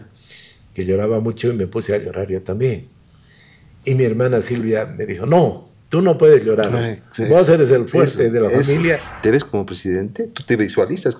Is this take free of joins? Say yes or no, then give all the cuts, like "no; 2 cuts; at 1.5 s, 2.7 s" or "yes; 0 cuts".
no; 1 cut; at 9.1 s